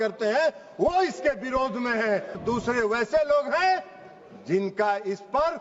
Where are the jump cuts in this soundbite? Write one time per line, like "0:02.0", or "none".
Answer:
0:02.4